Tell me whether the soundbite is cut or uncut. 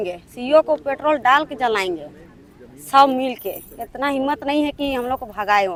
uncut